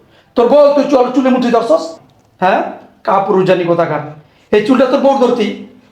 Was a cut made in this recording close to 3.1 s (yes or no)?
no